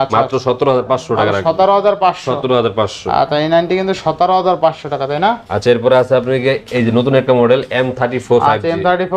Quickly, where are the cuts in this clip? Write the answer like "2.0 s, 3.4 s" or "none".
none